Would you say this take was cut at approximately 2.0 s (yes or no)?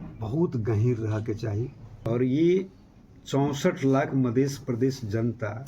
yes